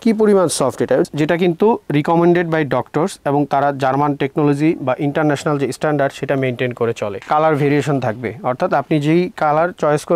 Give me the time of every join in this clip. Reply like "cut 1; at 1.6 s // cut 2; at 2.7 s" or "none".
cut 1; at 1.1 s // cut 2; at 7.2 s